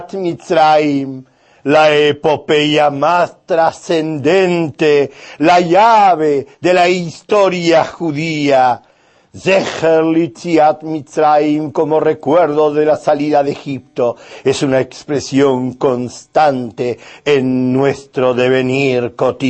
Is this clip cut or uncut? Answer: cut